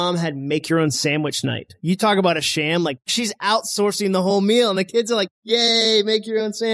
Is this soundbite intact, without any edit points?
no; 1 cut; at 3.1 s

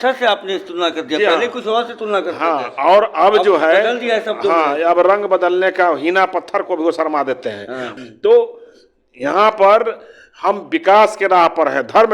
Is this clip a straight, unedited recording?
no; 1 cut; at 7.8 s

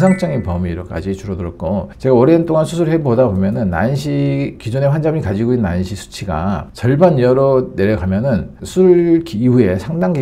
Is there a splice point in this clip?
no; 0 cuts

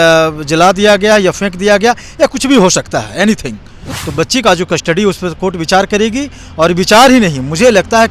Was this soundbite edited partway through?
yes; 1 cut; at 3.8 s

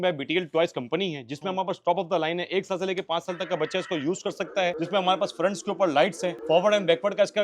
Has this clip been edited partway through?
yes; 2 cuts; at 4.8 s, 6.3 s

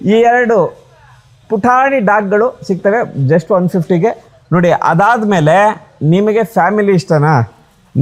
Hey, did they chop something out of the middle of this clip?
no; 0 cuts

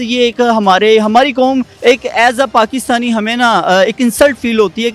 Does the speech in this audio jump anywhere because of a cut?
yes; 1 cut; at 1.7 s

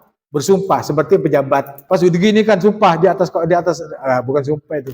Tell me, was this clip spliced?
yes; 1 cut; at 1.8 s

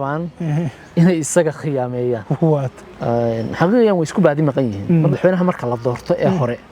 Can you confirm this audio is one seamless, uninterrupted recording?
no; 1 cut; at 5.1 s

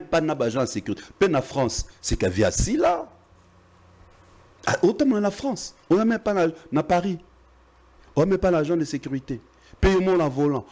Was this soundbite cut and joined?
no; 0 cuts

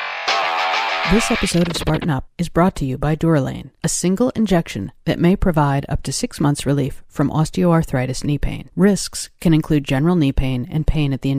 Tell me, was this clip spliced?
yes; 1 cut; at 1.1 s

